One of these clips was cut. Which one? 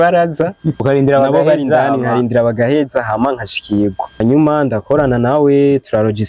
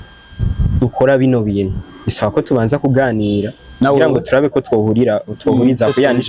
first; 2 cuts; at 0.8 s, 4.2 s

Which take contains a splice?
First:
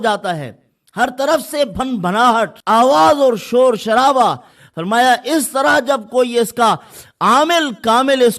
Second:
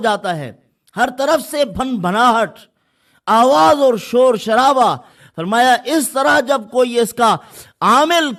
first; 1 cut; at 2.6 s

